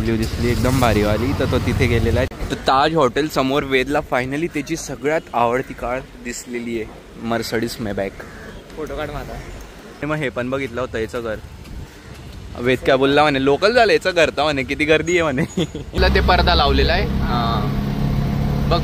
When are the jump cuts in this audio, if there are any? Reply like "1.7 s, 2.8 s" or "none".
2.3 s, 8.7 s, 10.0 s, 15.9 s